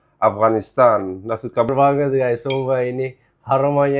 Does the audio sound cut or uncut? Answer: cut